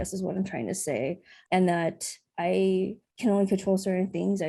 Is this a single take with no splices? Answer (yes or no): no